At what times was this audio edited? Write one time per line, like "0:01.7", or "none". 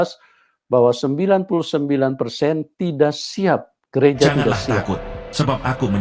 0:04.8